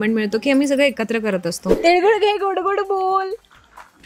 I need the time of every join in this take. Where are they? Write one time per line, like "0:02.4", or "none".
0:01.6